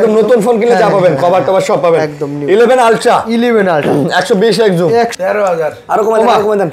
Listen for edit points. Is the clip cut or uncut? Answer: cut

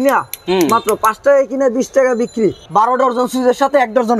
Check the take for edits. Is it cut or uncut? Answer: cut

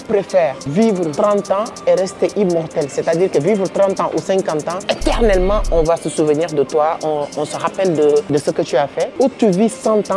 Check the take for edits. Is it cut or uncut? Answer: cut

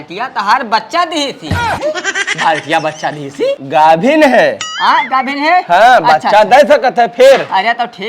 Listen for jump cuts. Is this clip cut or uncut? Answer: cut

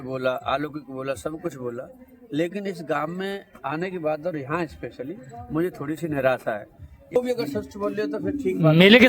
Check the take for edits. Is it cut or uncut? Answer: cut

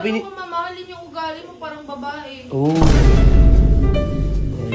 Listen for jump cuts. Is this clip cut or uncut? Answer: cut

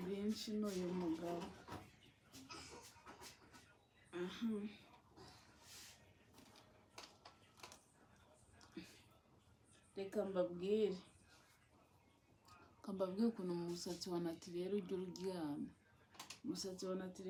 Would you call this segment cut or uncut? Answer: uncut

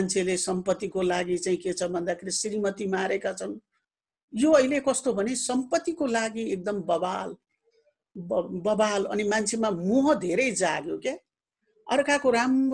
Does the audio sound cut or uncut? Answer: uncut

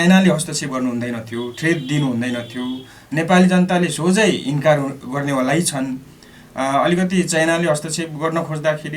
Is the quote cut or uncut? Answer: uncut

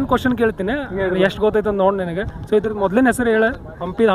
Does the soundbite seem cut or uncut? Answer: uncut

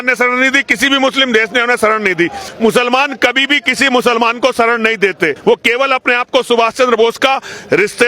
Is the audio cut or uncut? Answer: cut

